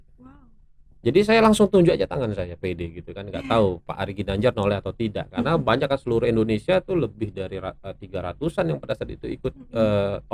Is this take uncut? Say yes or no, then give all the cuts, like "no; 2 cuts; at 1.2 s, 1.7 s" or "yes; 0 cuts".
yes; 0 cuts